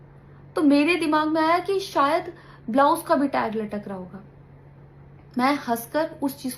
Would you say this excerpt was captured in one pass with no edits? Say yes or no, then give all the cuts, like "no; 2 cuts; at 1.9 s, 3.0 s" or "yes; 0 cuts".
yes; 0 cuts